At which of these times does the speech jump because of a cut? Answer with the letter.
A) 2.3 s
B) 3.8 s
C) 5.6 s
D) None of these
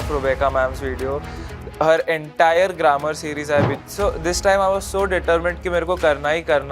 B